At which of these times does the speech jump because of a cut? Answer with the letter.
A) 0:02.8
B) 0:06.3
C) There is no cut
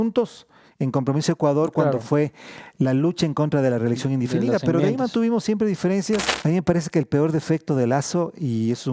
B